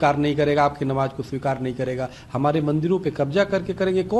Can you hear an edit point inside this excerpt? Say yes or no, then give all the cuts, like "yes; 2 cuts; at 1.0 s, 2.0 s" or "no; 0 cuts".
no; 0 cuts